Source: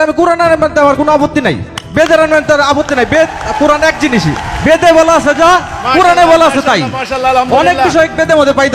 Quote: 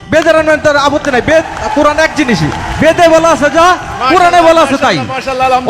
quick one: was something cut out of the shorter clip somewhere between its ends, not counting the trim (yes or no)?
no